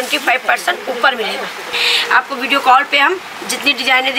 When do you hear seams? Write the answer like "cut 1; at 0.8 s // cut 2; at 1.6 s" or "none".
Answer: cut 1; at 1.8 s

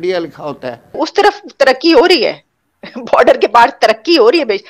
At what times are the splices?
cut 1; at 1.0 s

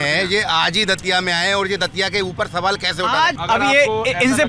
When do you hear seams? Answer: cut 1; at 3.4 s

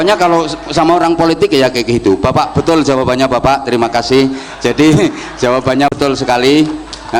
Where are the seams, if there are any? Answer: cut 1; at 5.9 s

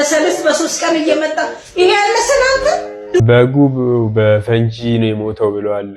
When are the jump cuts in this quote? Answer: cut 1; at 3.2 s

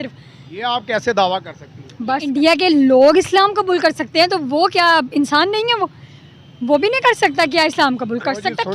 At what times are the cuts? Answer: cut 1; at 2.3 s

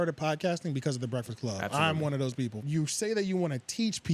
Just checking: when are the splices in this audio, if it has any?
cut 1; at 2.6 s

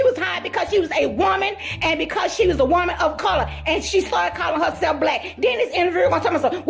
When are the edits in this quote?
none

